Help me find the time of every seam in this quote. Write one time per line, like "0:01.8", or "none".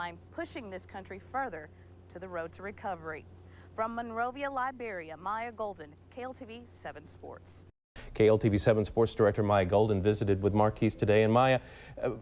0:07.9